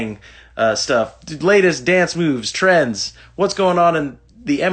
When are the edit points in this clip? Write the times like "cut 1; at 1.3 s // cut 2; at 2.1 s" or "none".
none